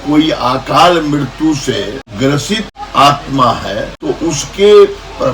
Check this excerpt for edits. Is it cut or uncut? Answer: cut